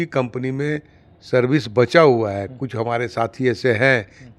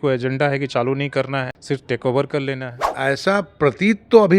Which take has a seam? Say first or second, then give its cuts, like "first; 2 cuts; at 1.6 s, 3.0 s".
second; 2 cuts; at 1.5 s, 2.8 s